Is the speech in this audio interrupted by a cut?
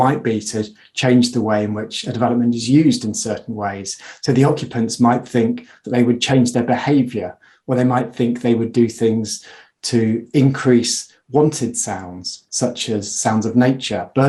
no; 0 cuts

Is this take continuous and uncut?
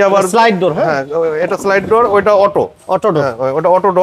yes; 0 cuts

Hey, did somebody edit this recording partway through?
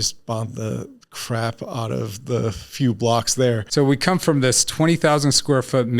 yes; 1 cut; at 3.6 s

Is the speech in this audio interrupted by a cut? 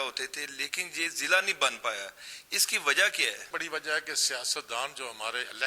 yes; 1 cut; at 3.5 s

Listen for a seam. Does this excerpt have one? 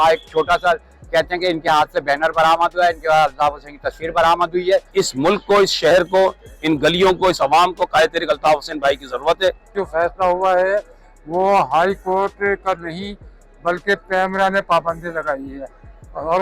yes; 2 cuts; at 4.9 s, 9.7 s

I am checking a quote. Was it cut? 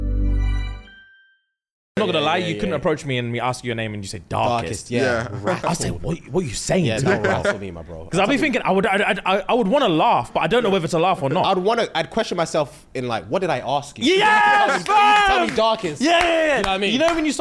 yes; 1 cut; at 2.0 s

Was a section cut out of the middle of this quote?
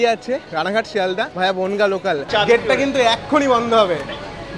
yes; 2 cuts; at 1.3 s, 2.2 s

